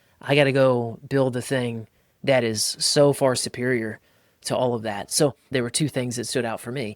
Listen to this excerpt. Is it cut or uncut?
cut